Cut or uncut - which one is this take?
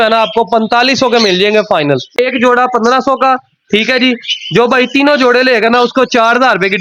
cut